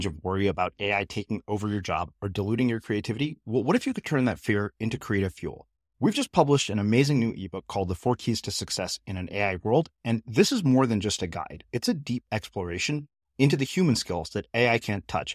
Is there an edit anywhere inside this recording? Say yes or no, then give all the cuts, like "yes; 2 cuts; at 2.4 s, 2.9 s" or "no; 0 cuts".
no; 0 cuts